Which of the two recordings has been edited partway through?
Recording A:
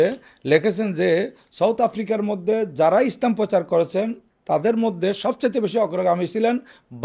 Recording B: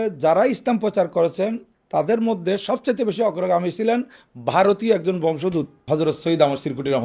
B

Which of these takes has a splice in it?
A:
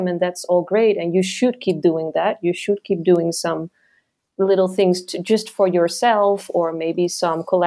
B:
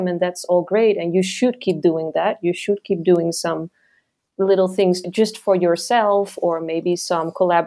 B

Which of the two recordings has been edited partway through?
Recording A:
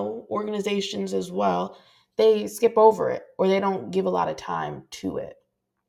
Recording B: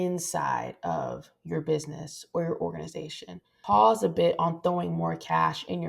B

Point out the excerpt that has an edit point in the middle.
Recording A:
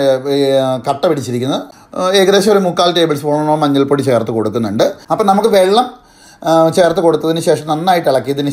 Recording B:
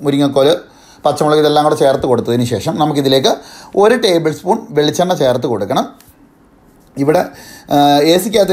A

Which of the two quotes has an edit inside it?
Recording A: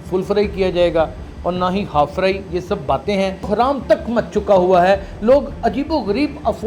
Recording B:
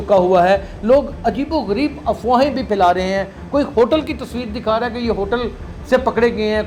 A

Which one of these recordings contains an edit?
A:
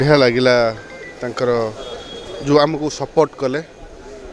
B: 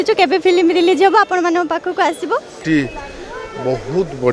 B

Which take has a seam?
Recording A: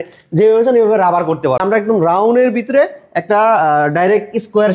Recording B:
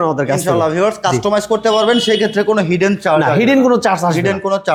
A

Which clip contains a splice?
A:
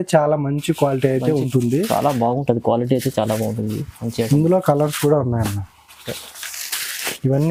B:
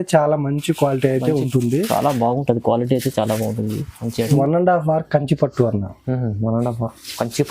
B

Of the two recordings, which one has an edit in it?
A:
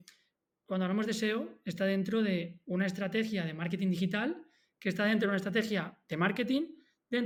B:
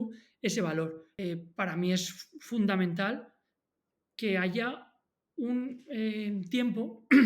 B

